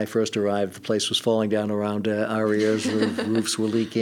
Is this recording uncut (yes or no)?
yes